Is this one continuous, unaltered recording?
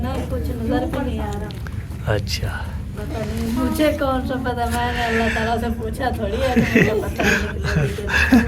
yes; 0 cuts

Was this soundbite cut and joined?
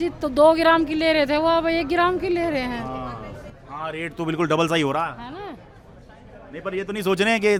no; 0 cuts

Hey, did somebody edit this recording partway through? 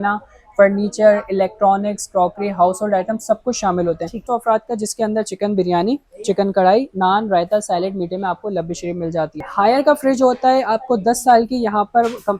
yes; 2 cuts; at 4.2 s, 9.4 s

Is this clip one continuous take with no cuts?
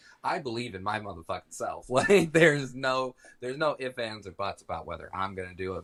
yes; 0 cuts

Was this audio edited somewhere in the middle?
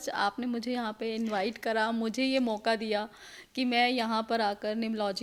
no; 0 cuts

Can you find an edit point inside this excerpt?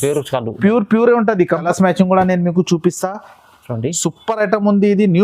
yes; 1 cut; at 1.6 s

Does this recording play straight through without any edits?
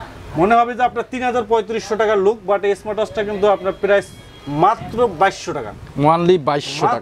yes; 0 cuts

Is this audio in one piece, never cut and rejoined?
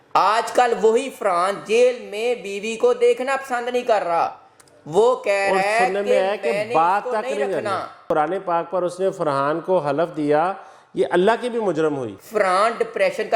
no; 2 cuts; at 8.0 s, 12.1 s

